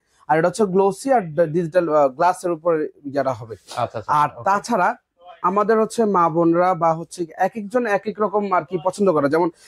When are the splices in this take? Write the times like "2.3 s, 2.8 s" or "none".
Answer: none